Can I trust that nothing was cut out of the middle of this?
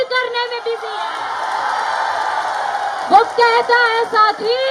yes; 0 cuts

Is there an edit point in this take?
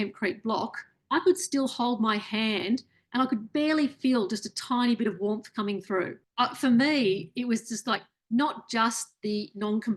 yes; 2 cuts; at 0.9 s, 6.2 s

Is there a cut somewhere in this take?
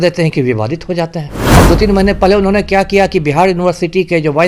yes; 1 cut; at 1.4 s

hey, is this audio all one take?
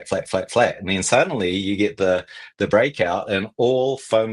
yes; 0 cuts

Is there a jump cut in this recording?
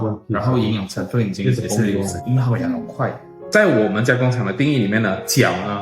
yes; 1 cut; at 3.5 s

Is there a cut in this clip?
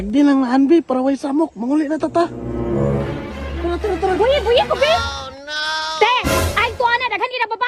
no; 0 cuts

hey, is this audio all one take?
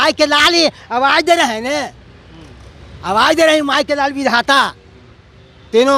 yes; 0 cuts

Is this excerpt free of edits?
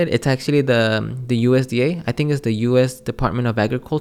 yes; 0 cuts

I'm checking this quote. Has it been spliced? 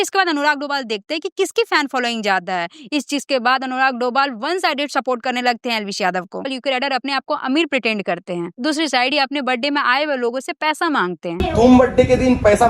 yes; 1 cut; at 6.4 s

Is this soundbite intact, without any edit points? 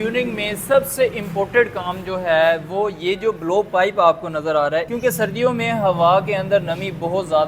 no; 1 cut; at 4.9 s

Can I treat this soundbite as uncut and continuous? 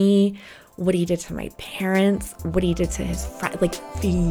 yes; 0 cuts

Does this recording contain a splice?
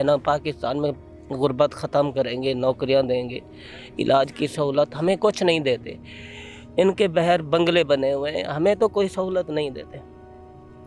no; 0 cuts

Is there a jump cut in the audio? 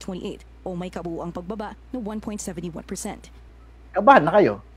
yes; 1 cut; at 3.6 s

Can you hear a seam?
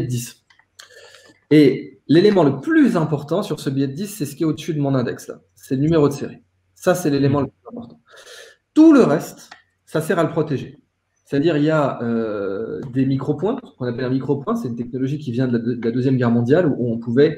no; 0 cuts

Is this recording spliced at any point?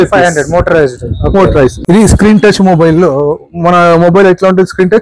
yes; 1 cut; at 1.8 s

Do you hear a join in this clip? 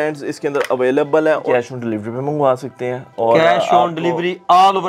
yes; 1 cut; at 1.4 s

